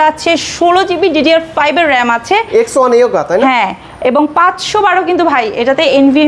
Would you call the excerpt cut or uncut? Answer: uncut